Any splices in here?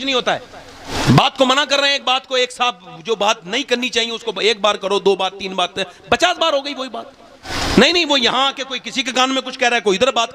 yes; 2 cuts; at 0.9 s, 7.5 s

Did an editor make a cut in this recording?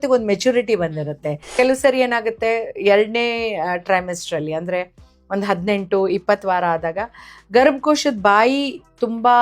yes; 1 cut; at 1.5 s

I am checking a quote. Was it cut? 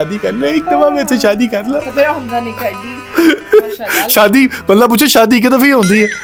no; 0 cuts

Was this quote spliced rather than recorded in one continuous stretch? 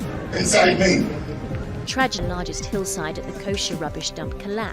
yes; 1 cut; at 2.2 s

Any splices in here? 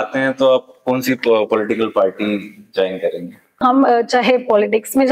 yes; 1 cut; at 3.6 s

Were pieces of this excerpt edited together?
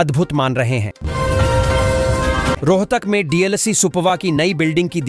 yes; 2 cuts; at 0.9 s, 2.6 s

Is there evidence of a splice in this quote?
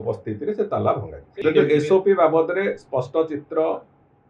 yes; 1 cut; at 1.3 s

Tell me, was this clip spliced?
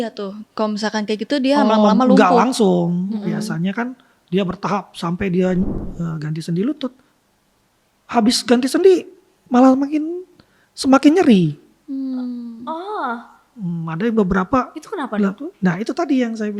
yes; 1 cut; at 5.7 s

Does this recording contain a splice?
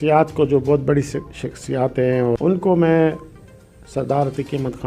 yes; 1 cut; at 2.4 s

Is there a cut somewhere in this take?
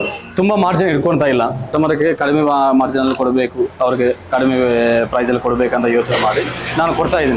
yes; 1 cut; at 1.6 s

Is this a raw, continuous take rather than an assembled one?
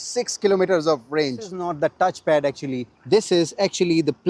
no; 1 cut; at 1.6 s

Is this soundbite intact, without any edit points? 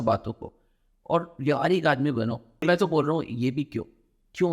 no; 1 cut; at 2.6 s

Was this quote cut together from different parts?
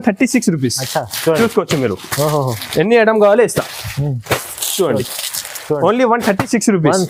no; 0 cuts

